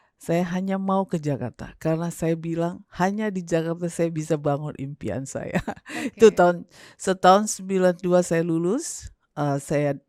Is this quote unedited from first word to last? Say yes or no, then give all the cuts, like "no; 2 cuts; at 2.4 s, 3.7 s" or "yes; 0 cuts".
yes; 0 cuts